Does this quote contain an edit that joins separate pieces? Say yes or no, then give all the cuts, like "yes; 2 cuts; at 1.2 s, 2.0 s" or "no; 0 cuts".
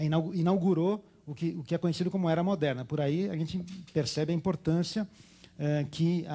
no; 0 cuts